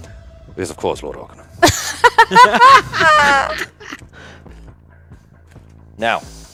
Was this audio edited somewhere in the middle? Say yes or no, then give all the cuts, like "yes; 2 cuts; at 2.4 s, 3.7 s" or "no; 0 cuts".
no; 0 cuts